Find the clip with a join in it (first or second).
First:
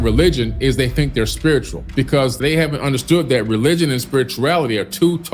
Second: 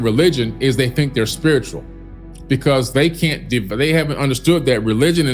first